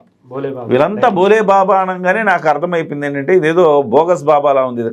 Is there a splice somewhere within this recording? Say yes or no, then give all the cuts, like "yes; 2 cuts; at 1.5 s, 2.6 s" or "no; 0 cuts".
no; 0 cuts